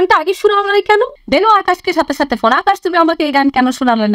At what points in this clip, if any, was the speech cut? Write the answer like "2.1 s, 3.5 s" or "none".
1.2 s